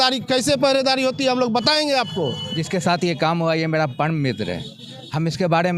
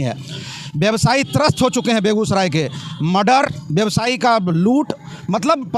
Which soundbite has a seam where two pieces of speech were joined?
first; 1 cut; at 2.5 s

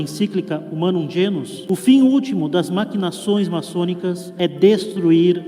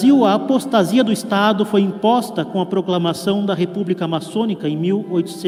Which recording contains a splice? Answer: first; 2 cuts; at 1.6 s, 4.3 s

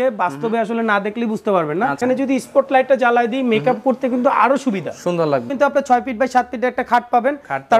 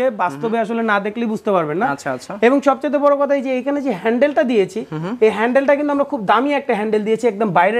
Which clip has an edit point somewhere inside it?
first; 2 cuts; at 2.0 s, 5.5 s

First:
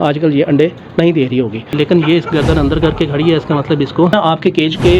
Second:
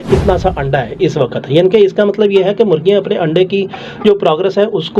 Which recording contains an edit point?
first; 2 cuts; at 1.7 s, 4.1 s

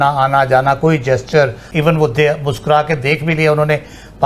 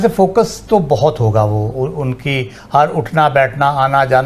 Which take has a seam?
first; 1 cut; at 1.6 s

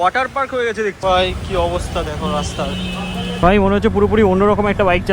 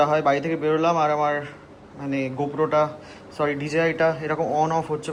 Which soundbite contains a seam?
first; 2 cuts; at 1.0 s, 3.4 s

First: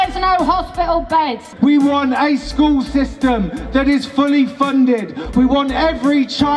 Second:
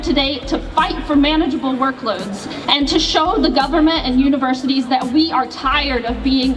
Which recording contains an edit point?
first; 1 cut; at 1.4 s

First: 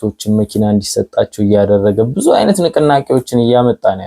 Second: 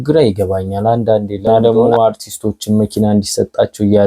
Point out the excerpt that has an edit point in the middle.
second; 1 cut; at 1.5 s

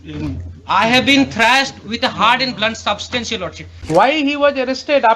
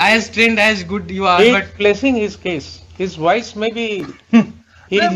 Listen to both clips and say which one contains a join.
first; 1 cut; at 3.7 s

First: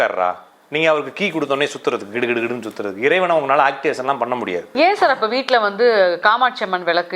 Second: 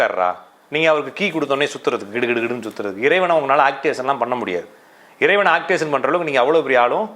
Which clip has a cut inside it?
first; 1 cut; at 4.7 s

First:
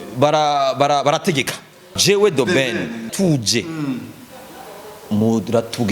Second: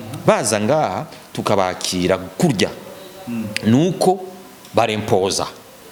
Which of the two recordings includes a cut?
first; 2 cuts; at 1.8 s, 3.1 s

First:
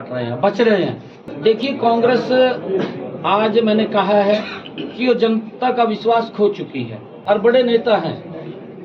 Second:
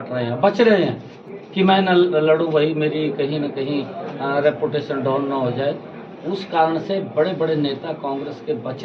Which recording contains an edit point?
first; 2 cuts; at 1.2 s, 7.1 s

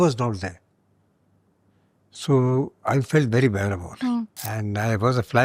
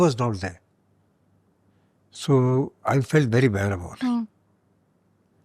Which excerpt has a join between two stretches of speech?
first; 1 cut; at 4.4 s

